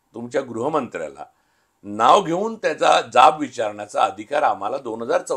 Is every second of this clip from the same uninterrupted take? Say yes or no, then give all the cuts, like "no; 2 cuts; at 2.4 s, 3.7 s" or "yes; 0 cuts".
yes; 0 cuts